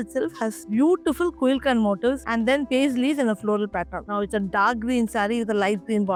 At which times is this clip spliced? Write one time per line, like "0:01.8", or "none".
none